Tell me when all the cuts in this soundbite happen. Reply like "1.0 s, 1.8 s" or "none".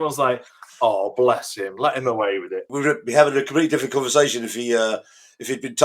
2.6 s

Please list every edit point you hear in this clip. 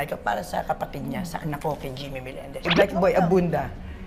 2.5 s

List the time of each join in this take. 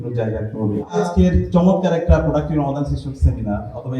1.0 s

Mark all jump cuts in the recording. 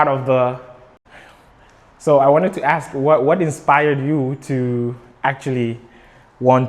1.2 s

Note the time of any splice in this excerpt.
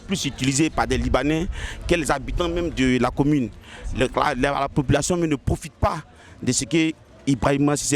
none

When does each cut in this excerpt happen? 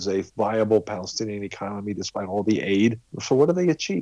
3.1 s

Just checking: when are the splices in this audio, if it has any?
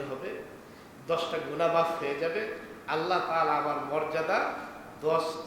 none

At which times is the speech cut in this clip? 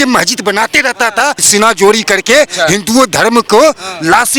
1.4 s

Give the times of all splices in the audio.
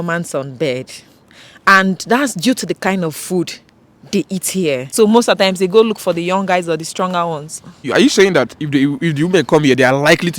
4.9 s, 7.9 s

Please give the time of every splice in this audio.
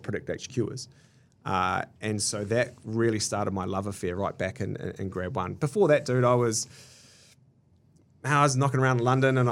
none

